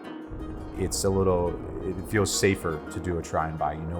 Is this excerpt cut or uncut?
uncut